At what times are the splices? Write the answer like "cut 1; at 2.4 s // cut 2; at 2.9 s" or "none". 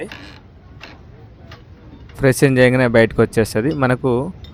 none